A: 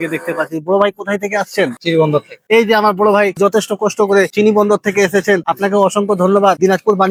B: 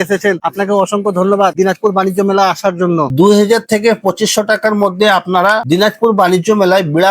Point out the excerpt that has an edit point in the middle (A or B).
B